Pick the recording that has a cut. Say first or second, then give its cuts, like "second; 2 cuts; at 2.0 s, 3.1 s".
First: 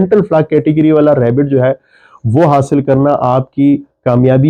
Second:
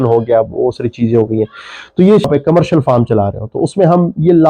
second; 1 cut; at 2.3 s